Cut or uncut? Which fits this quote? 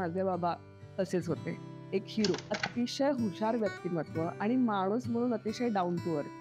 cut